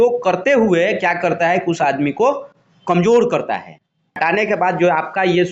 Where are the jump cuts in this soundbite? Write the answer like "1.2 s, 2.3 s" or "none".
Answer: 4.2 s